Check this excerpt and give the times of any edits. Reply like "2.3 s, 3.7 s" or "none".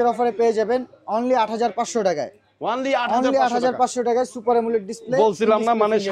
none